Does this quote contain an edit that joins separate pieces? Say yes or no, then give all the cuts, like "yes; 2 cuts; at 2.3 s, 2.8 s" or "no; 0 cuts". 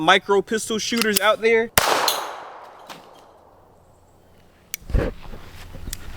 yes; 1 cut; at 1.7 s